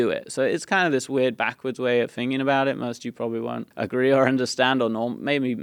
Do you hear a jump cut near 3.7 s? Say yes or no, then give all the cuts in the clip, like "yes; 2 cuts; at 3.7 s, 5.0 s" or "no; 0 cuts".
yes; 1 cut; at 3.7 s